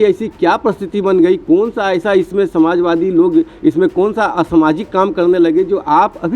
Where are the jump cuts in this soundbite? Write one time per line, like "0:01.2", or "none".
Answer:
none